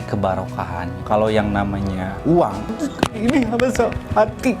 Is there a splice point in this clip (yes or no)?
yes